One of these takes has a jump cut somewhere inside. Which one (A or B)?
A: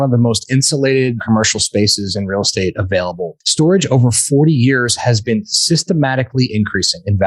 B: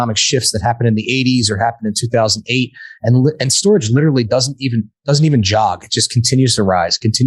A